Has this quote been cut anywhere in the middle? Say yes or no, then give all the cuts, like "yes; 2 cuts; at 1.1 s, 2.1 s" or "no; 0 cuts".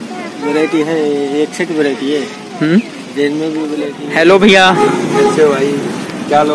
yes; 1 cut; at 4.0 s